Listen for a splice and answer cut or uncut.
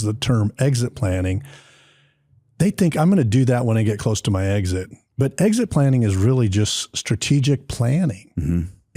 uncut